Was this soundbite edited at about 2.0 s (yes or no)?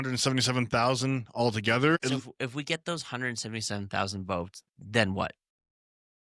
yes